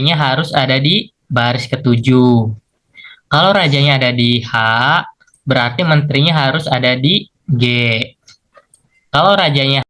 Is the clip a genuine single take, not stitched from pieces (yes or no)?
yes